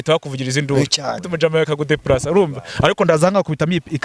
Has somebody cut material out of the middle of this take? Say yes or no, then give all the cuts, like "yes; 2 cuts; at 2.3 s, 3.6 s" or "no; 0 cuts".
yes; 1 cut; at 1.2 s